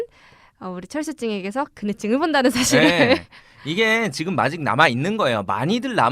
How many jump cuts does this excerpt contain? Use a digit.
1